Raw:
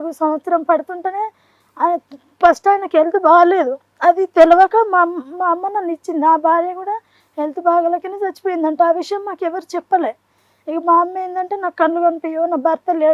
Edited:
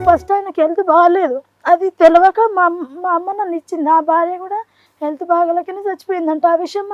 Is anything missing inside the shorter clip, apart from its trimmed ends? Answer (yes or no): no